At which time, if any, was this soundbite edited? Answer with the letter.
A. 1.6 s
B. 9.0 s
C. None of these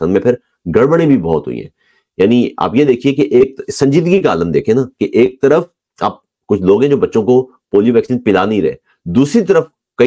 C